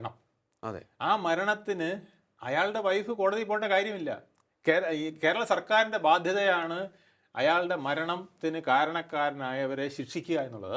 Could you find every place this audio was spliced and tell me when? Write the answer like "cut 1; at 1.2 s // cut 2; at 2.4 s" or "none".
none